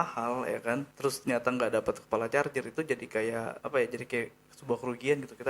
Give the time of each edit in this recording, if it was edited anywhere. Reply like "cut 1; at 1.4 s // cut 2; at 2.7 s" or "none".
cut 1; at 0.9 s // cut 2; at 3.6 s